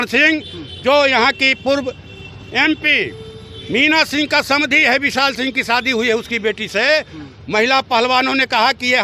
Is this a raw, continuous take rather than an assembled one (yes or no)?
yes